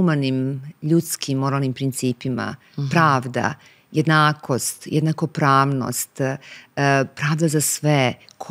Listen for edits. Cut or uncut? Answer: uncut